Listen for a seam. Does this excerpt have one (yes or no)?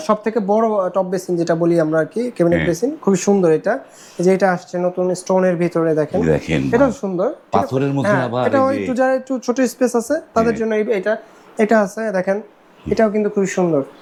no